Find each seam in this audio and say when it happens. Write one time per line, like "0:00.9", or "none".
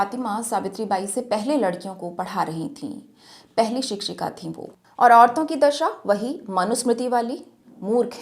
0:04.7